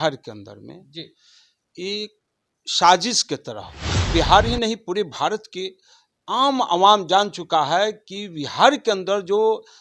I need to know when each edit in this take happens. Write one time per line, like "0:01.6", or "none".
0:04.1